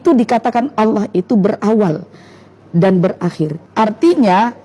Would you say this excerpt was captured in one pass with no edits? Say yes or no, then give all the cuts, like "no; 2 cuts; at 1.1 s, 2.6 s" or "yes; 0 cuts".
no; 1 cut; at 3.6 s